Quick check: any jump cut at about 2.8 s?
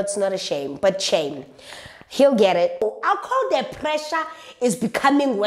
yes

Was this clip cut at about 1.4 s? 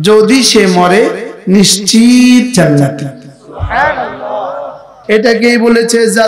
no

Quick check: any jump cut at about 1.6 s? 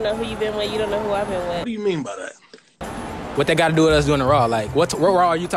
no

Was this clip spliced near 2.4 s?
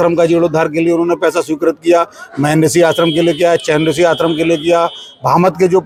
no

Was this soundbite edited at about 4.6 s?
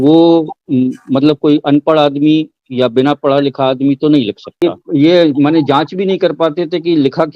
yes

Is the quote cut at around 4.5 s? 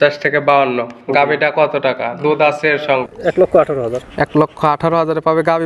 no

